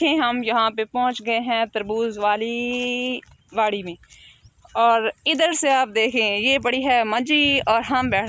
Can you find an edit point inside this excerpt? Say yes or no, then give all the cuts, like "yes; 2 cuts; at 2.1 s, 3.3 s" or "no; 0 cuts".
no; 0 cuts